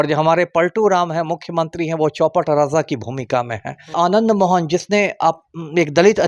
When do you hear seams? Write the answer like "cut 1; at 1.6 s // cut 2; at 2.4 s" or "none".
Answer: cut 1; at 3.9 s